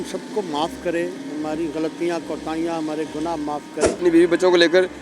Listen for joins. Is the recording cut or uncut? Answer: cut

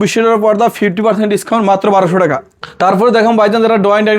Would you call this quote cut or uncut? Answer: cut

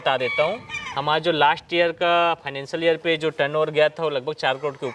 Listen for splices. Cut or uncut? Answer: uncut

